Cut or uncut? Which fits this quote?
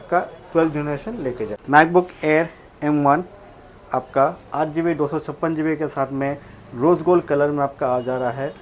cut